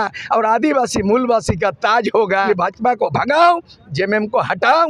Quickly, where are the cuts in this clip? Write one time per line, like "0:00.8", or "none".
0:02.5